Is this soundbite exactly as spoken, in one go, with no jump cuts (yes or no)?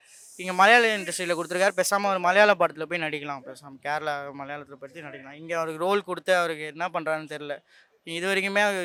yes